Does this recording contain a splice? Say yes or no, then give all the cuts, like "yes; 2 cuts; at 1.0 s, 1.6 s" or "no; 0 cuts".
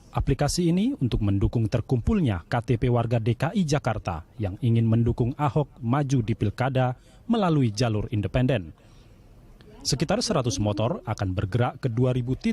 no; 0 cuts